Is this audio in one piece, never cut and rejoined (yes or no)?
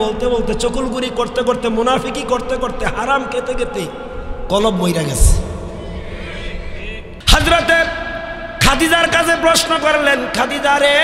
no